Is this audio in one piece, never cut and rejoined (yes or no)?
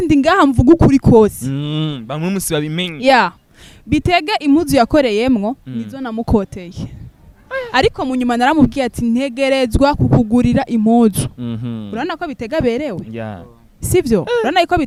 yes